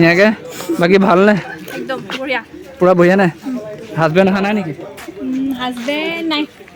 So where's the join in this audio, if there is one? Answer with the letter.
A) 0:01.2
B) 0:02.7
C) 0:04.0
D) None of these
D